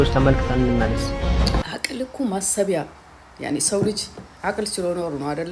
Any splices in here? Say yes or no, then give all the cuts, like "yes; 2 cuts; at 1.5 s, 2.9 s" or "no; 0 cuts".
yes; 1 cut; at 1.6 s